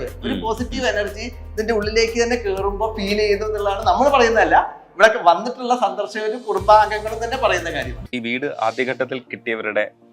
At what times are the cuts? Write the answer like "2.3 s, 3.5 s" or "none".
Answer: 8.1 s